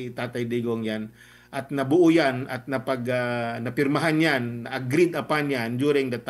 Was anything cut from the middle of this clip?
no; 0 cuts

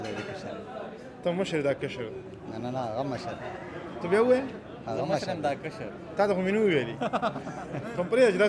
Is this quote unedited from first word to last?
yes; 0 cuts

